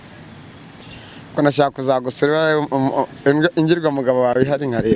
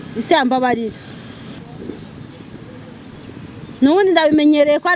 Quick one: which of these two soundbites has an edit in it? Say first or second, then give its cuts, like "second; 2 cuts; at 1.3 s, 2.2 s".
second; 1 cut; at 1.7 s